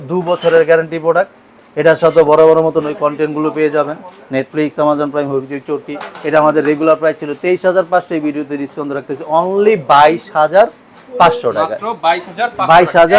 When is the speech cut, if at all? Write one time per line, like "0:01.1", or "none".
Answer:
none